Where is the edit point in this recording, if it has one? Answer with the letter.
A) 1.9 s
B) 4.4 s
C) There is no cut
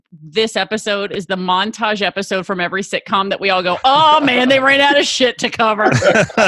C